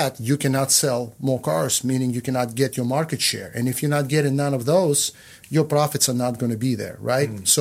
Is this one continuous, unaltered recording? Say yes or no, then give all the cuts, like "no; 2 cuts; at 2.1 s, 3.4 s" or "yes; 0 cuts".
yes; 0 cuts